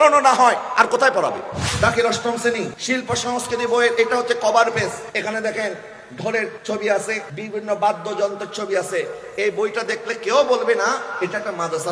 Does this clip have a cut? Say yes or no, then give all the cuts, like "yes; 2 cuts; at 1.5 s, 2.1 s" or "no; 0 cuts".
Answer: yes; 5 cuts; at 1.6 s, 2.8 s, 5.0 s, 6.6 s, 7.3 s